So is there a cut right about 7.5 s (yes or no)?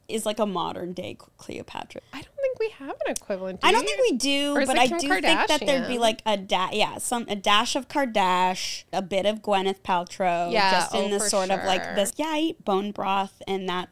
no